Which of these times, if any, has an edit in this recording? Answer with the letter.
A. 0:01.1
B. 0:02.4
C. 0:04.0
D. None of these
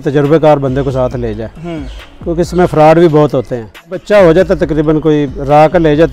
C